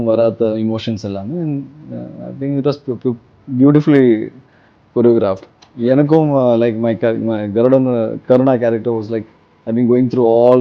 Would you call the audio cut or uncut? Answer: uncut